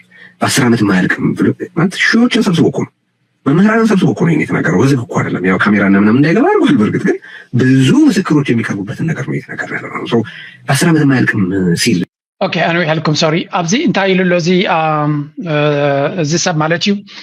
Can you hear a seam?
no; 0 cuts

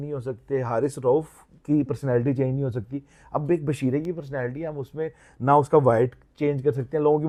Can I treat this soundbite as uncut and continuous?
yes; 0 cuts

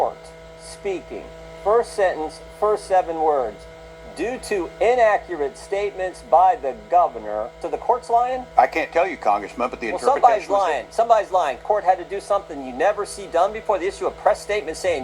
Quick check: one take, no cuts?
no; 3 cuts; at 7.7 s, 8.5 s, 11.6 s

